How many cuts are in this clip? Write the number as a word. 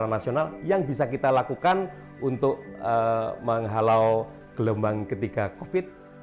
zero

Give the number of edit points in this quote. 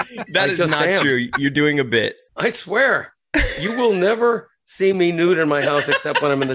one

